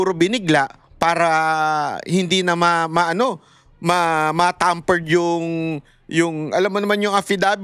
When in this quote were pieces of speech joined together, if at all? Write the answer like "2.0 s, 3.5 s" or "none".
none